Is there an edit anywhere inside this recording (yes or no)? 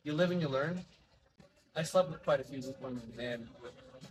yes